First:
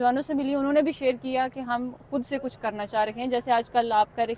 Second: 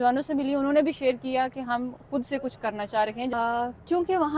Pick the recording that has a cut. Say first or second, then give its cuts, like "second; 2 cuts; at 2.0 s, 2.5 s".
second; 1 cut; at 3.3 s